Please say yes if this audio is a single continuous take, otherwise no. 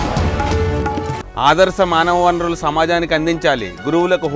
no